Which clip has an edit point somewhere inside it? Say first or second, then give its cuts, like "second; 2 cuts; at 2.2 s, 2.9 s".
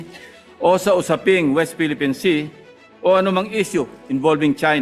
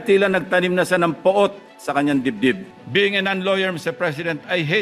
second; 1 cut; at 2.7 s